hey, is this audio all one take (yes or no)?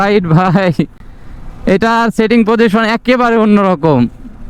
yes